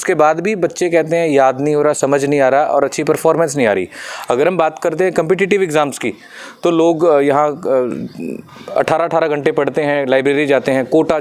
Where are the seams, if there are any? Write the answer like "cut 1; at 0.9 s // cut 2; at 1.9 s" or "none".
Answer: none